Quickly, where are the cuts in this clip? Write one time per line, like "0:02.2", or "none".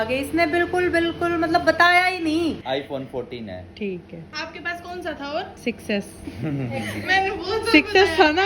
0:02.6